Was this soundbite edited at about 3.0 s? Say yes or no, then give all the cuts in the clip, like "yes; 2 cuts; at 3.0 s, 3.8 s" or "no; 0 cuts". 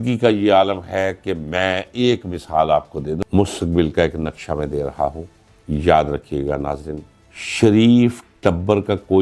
yes; 1 cut; at 3.0 s